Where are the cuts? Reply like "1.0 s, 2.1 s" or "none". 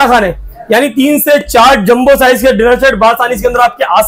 none